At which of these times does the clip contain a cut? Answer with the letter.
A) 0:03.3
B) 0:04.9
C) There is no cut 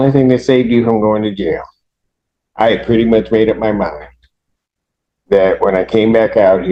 C